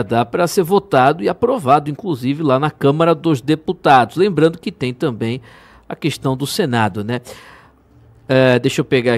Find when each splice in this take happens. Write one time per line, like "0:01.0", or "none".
none